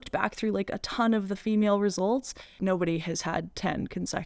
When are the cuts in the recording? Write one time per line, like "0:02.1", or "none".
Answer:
0:02.5